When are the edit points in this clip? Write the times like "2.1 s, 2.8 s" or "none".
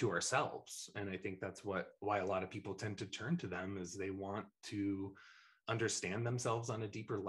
none